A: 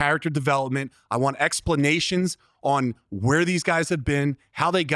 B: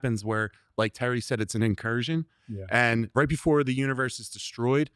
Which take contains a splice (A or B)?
B